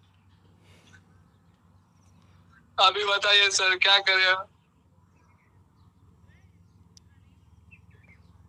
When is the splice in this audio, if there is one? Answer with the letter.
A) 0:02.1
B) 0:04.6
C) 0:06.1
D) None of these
D